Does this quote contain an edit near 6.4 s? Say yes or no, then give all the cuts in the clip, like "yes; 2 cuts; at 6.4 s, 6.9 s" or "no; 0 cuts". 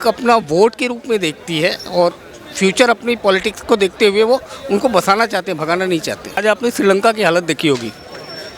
yes; 1 cut; at 6.4 s